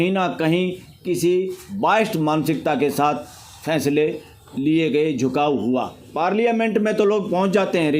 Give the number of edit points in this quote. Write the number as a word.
one